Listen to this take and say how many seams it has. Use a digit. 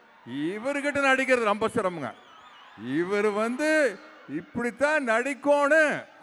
0